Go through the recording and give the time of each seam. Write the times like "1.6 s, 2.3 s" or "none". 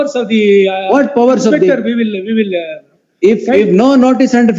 none